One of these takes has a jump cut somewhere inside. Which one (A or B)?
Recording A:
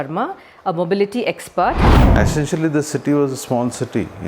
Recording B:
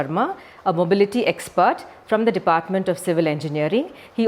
A